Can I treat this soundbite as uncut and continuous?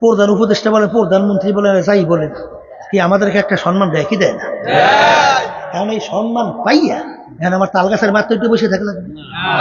yes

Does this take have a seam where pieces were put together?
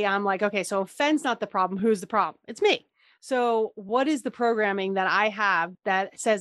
no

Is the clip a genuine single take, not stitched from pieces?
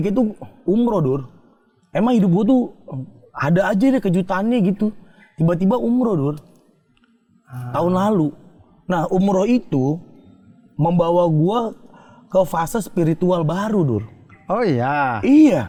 yes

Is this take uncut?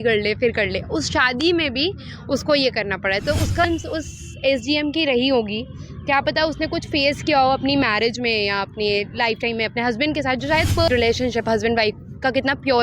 no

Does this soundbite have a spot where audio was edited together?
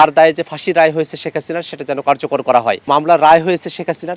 yes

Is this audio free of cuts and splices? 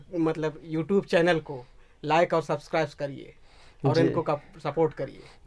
yes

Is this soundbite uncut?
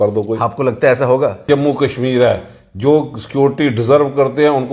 no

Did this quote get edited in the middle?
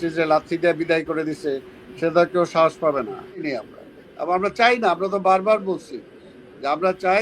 yes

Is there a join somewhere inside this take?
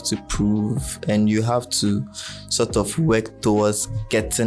no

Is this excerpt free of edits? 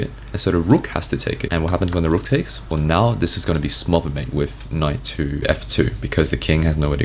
no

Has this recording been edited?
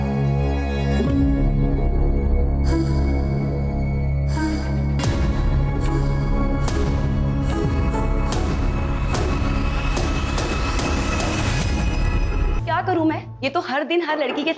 yes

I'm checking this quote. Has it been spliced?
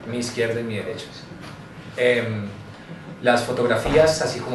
no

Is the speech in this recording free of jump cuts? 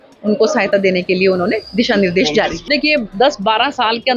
no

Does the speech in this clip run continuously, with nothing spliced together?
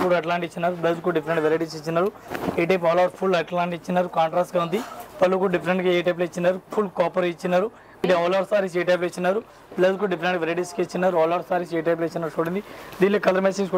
no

